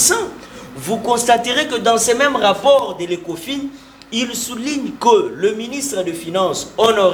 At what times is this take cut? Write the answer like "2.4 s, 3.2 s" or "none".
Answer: none